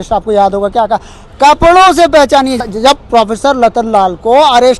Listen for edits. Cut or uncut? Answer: cut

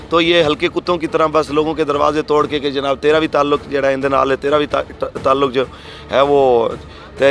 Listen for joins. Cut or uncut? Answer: uncut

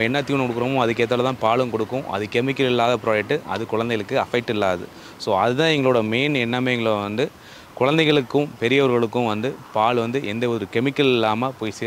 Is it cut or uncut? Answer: uncut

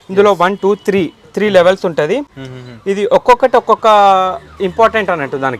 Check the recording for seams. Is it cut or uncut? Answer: uncut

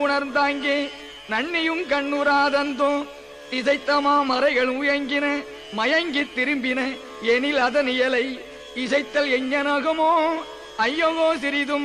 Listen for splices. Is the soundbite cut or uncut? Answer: uncut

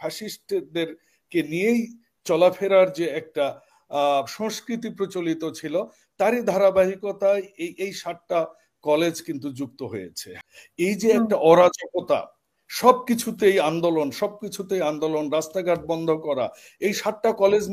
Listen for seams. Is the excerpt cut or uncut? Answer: cut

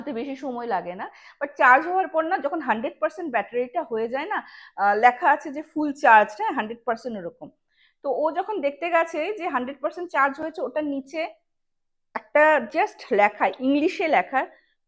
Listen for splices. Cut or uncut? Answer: uncut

